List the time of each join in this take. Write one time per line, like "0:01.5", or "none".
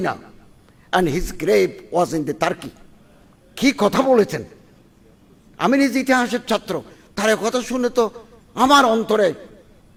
none